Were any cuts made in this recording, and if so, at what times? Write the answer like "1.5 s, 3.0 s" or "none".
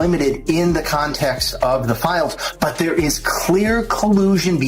none